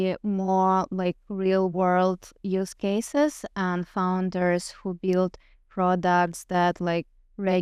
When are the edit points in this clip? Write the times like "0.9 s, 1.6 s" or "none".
none